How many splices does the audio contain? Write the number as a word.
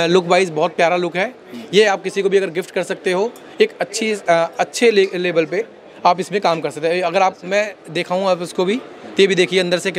zero